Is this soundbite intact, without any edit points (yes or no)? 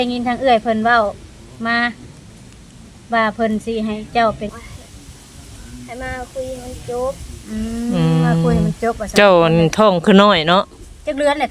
no